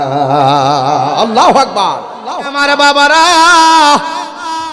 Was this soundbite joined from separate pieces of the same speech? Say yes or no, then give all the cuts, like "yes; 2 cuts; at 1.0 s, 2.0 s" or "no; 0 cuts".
yes; 1 cut; at 2.5 s